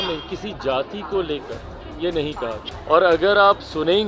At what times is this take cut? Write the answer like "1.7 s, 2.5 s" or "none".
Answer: 2.7 s